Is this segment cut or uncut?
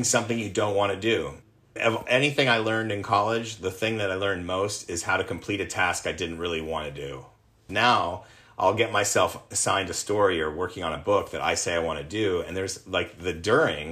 cut